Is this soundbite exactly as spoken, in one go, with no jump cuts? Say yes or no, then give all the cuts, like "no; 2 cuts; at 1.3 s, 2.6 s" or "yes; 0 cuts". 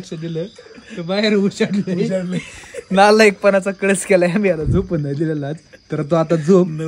yes; 0 cuts